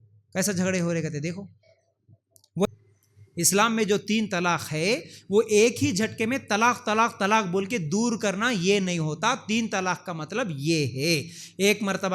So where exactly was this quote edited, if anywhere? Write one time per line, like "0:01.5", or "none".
0:02.7